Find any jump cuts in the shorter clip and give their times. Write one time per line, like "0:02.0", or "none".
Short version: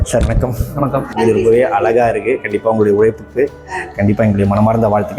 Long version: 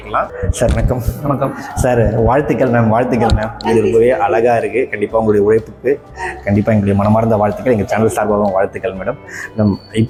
0:01.1